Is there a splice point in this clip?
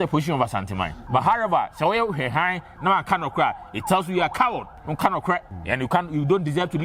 yes; 3 cuts; at 0.9 s, 4.8 s, 5.5 s

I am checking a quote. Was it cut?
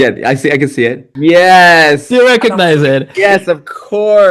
yes; 1 cut; at 1.1 s

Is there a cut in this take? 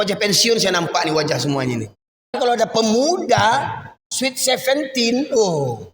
yes; 1 cut; at 2.3 s

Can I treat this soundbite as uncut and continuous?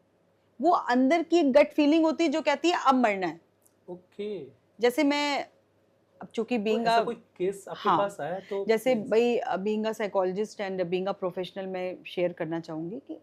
yes; 0 cuts

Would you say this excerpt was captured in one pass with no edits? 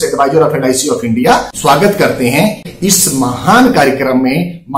no; 2 cuts; at 1.5 s, 2.7 s

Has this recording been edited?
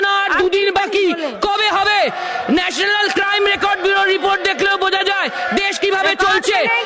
no; 0 cuts

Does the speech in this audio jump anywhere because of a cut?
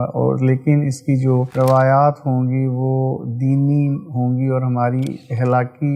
no; 0 cuts

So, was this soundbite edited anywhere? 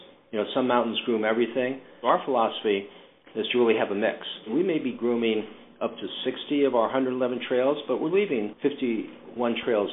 yes; 3 cuts; at 2.0 s, 4.5 s, 8.8 s

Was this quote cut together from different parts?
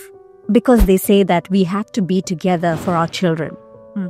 no; 0 cuts

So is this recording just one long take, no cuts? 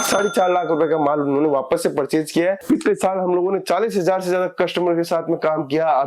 no; 1 cut; at 2.6 s

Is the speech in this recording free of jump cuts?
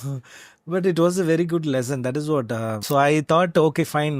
no; 1 cut; at 2.8 s

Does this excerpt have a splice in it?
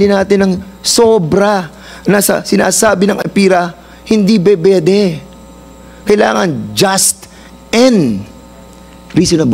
no; 0 cuts

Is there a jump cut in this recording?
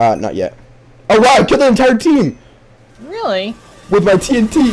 no; 0 cuts

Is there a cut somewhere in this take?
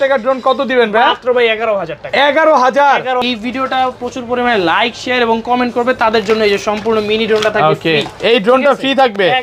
yes; 1 cut; at 3.2 s

